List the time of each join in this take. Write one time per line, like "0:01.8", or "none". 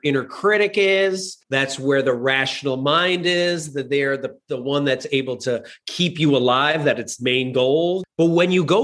0:01.3
0:08.0